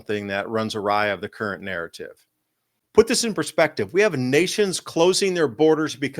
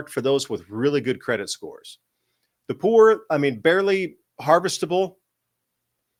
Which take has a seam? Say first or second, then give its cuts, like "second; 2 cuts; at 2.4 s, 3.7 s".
first; 1 cut; at 2.8 s